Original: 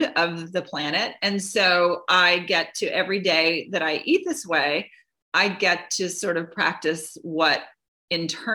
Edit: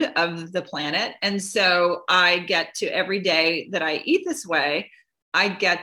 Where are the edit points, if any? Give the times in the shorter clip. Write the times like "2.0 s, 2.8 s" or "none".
none

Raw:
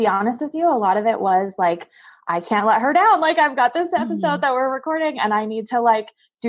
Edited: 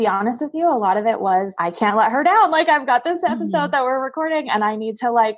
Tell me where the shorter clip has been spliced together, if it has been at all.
1.5 s

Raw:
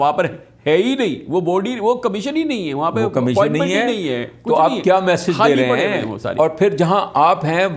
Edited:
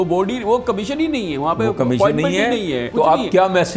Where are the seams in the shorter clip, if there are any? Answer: 2.8 s

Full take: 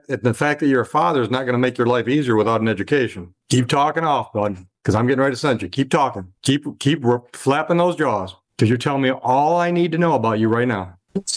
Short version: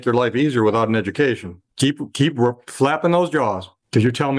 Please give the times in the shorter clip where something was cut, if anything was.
1.6 s

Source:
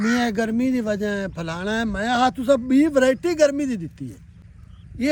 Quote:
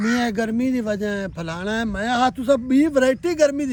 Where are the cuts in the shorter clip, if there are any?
none

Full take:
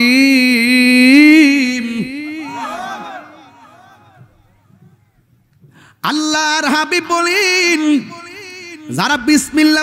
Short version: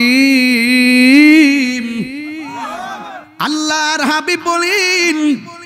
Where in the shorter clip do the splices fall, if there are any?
3.2 s

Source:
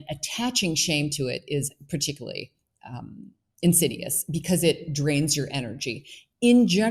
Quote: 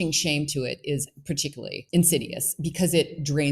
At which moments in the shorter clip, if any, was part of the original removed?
1.8 s

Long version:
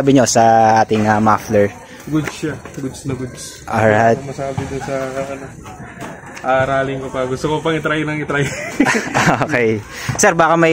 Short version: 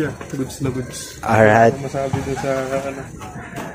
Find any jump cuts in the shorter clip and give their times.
none

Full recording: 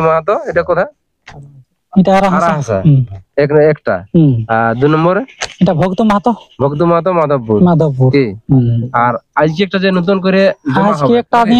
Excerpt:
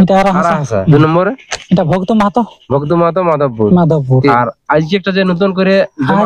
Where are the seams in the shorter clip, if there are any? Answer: 0.9 s, 4.3 s

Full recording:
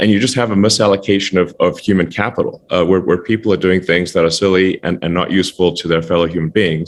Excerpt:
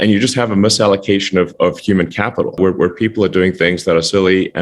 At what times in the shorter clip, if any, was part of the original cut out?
2.6 s

